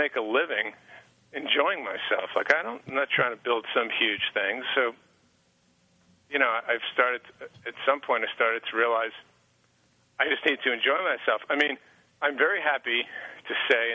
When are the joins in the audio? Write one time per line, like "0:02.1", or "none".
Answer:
none